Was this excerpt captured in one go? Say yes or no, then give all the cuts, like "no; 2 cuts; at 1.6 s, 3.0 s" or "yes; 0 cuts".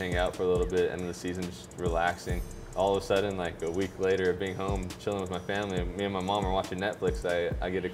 no; 1 cut; at 2.5 s